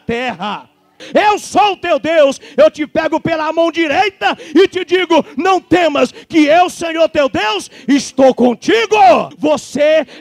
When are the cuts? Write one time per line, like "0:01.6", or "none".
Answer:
0:01.0
0:09.3